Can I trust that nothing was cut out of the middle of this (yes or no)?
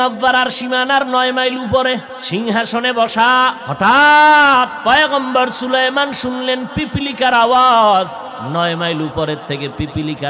no